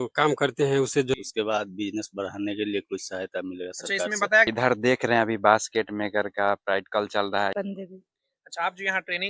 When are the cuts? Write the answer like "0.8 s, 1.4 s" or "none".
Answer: 1.1 s, 4.5 s, 7.5 s